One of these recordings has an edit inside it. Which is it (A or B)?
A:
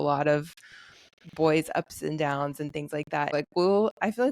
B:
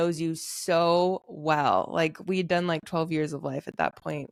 A